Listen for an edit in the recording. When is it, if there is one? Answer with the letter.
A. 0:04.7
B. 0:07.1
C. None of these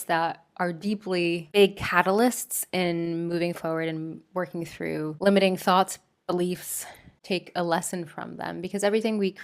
B